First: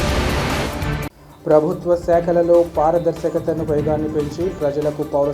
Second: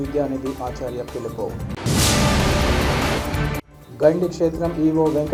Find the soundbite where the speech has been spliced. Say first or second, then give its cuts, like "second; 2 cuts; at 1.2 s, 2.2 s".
first; 1 cut; at 0.9 s